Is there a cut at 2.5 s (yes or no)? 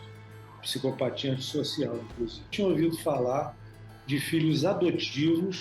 yes